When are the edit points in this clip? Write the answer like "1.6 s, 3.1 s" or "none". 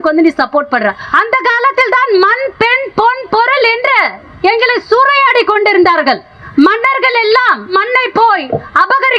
1.0 s, 4.2 s, 6.3 s, 7.7 s

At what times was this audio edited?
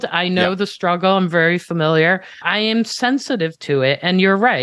2.4 s

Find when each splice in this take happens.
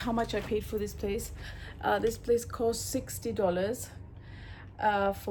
none

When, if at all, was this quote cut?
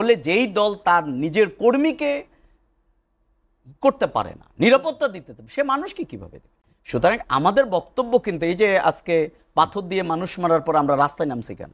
none

